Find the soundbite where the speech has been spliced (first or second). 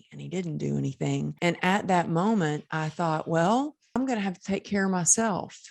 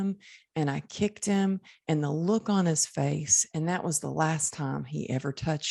first